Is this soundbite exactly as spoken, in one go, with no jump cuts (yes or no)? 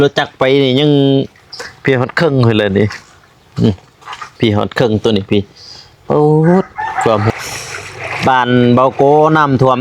no